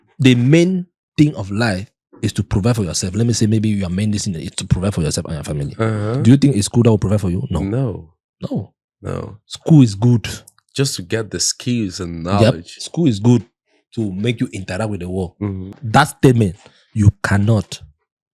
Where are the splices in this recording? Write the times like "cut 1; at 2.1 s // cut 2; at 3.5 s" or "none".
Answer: cut 1; at 15.8 s